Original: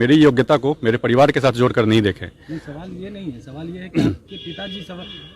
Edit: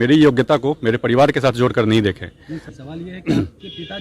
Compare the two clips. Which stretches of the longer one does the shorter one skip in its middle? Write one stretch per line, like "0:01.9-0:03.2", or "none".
0:02.8-0:03.4